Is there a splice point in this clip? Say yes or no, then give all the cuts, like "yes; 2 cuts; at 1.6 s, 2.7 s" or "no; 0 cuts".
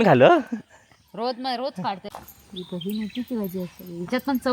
yes; 1 cut; at 2.0 s